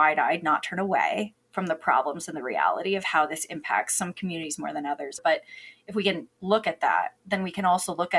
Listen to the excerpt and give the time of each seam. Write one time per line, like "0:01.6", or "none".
none